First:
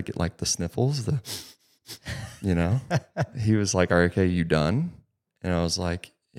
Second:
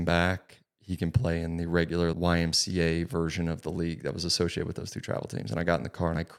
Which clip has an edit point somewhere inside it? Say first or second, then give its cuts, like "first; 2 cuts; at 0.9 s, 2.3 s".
second; 1 cut; at 2.1 s